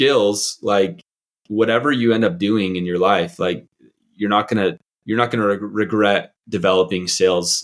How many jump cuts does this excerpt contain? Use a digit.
1